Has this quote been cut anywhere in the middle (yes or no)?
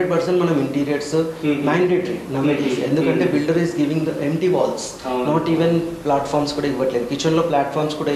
no